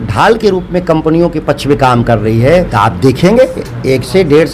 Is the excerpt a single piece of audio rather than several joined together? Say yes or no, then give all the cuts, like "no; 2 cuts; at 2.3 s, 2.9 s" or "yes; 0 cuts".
no; 1 cut; at 2.7 s